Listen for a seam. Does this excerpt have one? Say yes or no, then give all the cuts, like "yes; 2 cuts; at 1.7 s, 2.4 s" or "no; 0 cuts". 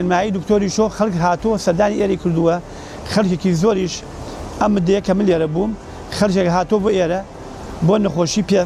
no; 0 cuts